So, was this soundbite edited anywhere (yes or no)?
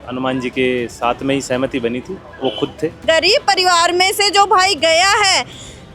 yes